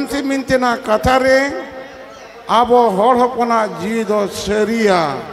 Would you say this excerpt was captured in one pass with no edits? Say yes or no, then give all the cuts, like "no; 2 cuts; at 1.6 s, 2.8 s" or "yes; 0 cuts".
yes; 0 cuts